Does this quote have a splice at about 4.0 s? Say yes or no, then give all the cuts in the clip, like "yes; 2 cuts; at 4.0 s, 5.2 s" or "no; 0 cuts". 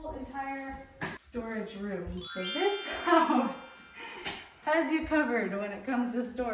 no; 2 cuts; at 1.2 s, 2.3 s